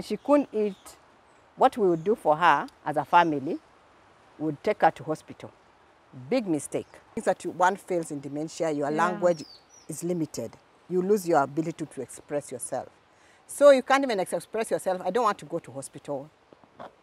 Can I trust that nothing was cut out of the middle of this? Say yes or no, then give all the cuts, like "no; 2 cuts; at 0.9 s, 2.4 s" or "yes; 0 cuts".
no; 1 cut; at 7.2 s